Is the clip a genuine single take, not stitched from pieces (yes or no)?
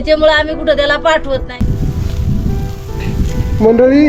no